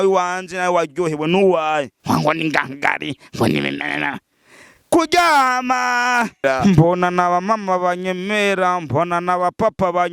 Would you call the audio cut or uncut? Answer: cut